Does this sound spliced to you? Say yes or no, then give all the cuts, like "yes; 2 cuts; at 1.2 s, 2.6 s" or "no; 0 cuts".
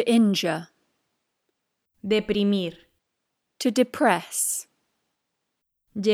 no; 0 cuts